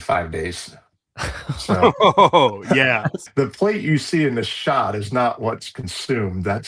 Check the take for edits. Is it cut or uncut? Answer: cut